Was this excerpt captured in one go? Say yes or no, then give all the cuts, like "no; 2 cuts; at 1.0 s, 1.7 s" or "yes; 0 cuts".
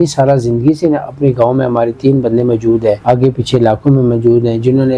no; 1 cut; at 3.0 s